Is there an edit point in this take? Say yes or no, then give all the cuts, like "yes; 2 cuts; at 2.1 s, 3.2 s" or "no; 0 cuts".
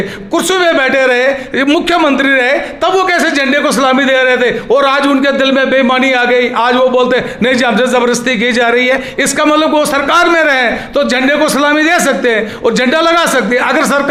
no; 0 cuts